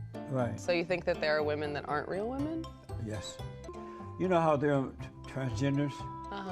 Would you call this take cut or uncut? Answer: cut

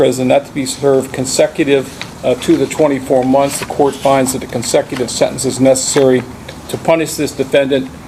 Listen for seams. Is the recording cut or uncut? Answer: uncut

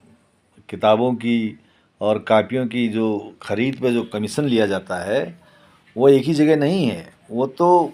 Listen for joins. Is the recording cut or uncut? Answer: uncut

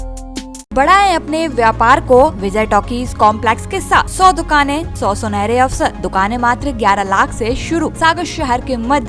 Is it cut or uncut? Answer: cut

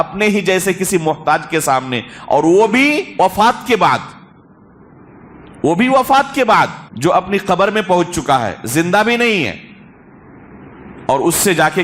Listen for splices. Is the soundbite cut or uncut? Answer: cut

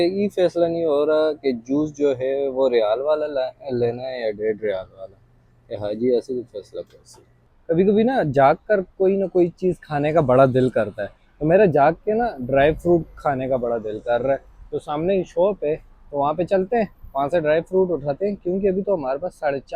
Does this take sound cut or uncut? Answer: cut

